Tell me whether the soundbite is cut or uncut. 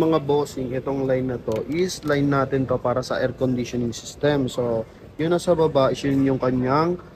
uncut